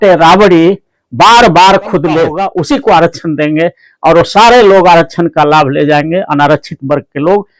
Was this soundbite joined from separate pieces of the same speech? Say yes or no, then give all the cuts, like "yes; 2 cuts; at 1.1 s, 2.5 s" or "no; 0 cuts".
yes; 1 cut; at 2.4 s